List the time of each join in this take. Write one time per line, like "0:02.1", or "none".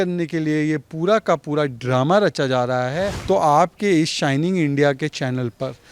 0:03.2